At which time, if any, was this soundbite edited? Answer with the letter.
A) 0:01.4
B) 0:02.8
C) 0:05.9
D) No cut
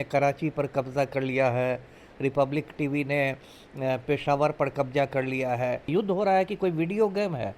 C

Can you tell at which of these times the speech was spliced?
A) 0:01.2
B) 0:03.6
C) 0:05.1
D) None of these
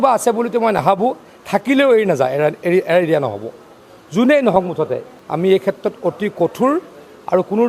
C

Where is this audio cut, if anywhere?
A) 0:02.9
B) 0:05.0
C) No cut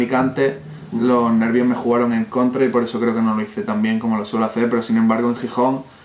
C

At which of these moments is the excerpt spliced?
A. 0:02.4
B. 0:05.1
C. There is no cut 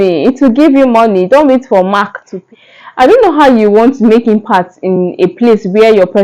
A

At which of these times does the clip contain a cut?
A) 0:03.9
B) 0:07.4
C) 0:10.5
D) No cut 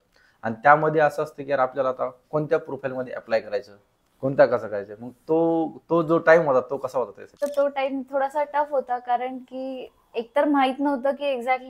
B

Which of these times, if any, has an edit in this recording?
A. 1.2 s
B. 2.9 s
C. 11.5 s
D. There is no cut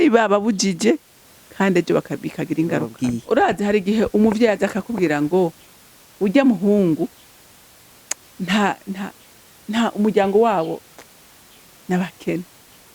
B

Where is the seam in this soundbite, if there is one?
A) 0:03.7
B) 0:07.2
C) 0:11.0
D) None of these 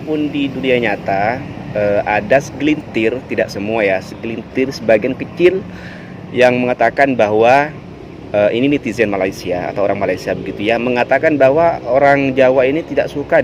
D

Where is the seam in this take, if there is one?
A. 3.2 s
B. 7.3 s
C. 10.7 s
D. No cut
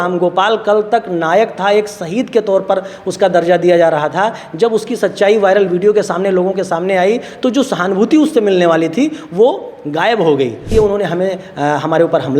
C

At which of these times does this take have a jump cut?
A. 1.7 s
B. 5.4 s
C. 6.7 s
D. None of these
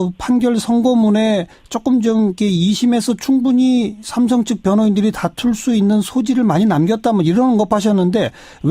A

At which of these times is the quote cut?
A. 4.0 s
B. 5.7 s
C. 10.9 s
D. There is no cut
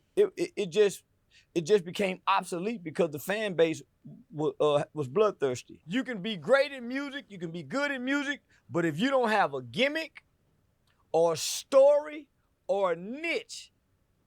B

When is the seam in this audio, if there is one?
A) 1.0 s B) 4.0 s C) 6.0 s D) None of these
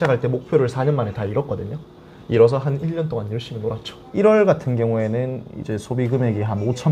B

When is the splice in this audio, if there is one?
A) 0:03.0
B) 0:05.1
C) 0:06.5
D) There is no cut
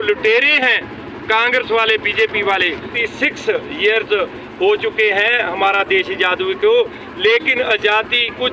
A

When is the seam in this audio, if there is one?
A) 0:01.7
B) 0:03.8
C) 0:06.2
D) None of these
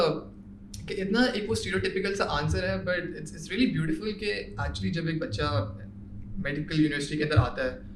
D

